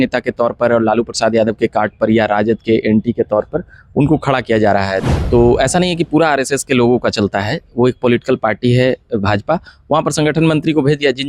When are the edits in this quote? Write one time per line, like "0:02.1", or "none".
0:05.0